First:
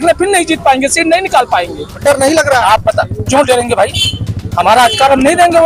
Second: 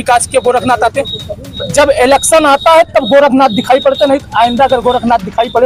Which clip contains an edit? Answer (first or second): first